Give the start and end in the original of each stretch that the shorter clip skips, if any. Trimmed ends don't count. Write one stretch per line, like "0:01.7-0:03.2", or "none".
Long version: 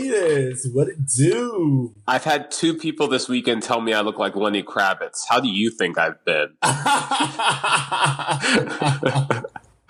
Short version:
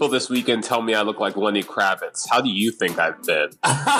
none